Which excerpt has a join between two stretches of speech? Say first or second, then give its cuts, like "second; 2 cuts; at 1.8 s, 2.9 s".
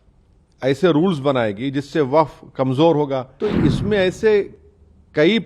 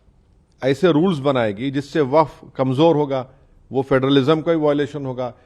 first; 1 cut; at 3.3 s